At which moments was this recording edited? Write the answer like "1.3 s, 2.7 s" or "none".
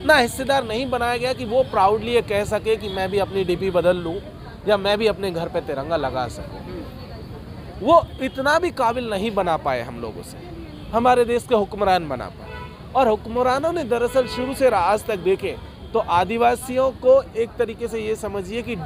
none

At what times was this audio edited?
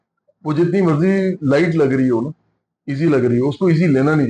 none

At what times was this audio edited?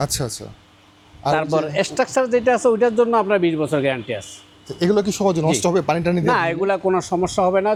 none

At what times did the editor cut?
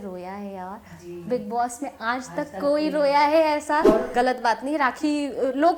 4.1 s

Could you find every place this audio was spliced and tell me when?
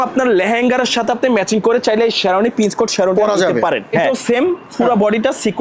4.1 s

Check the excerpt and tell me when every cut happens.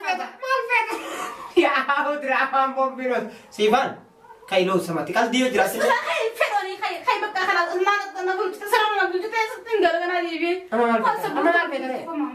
none

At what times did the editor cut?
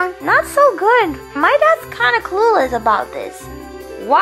1.4 s

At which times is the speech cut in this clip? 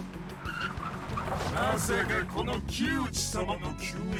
none

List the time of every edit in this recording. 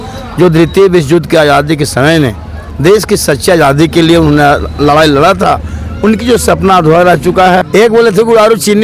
7.8 s

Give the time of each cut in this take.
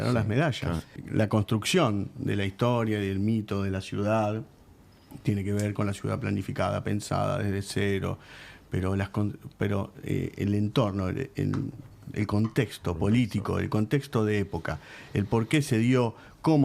1.0 s

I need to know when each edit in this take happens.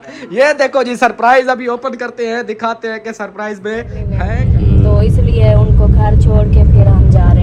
4.2 s

